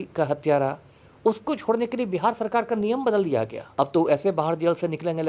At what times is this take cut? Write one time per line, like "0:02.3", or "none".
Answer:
0:03.6